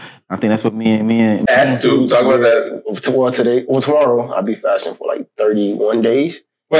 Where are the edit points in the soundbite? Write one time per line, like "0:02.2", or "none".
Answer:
0:01.5

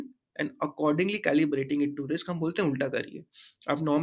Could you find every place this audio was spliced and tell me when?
none

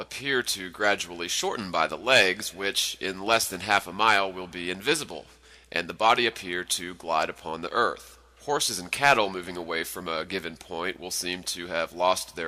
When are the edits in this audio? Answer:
none

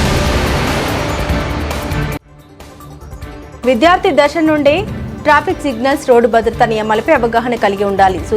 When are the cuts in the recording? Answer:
none

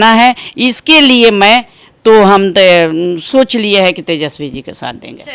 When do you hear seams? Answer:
none

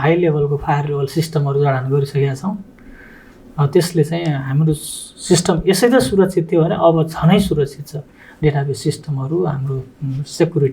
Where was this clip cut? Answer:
none

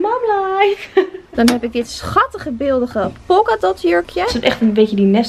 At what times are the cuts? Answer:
0:01.2
0:04.3

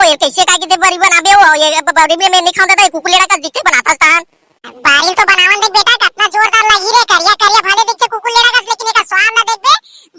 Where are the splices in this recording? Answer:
none

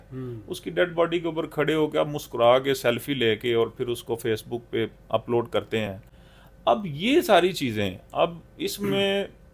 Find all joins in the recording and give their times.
none

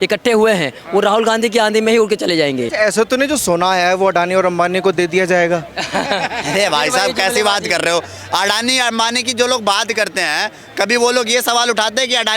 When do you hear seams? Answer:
0:02.7

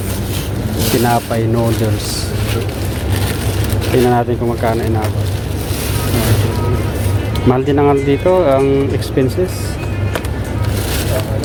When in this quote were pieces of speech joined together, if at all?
none

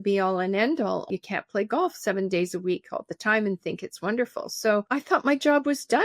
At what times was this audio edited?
0:01.1
0:04.9

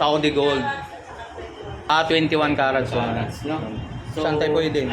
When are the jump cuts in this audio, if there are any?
0:01.9

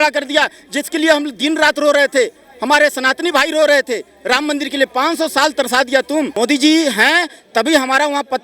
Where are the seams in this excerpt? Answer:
0:06.3

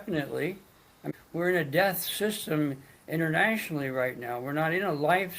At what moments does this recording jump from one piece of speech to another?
0:01.1

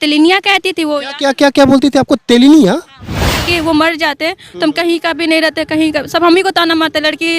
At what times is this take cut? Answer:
0:03.3

